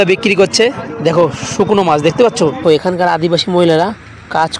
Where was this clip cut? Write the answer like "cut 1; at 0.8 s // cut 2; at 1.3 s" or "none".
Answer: cut 1; at 2.7 s